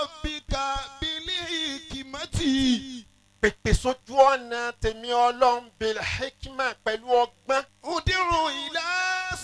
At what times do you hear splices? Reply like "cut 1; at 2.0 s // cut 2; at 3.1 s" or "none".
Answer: cut 1; at 7.7 s